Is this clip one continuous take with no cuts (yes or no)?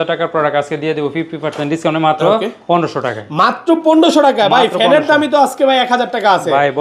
yes